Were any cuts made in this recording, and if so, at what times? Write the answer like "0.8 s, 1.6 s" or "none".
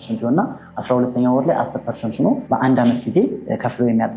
2.5 s